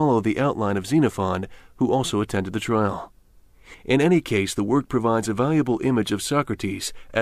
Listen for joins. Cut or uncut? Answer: cut